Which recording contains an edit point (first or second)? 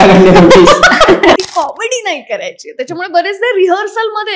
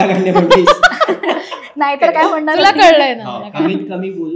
first